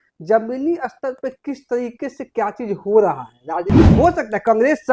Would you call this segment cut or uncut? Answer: cut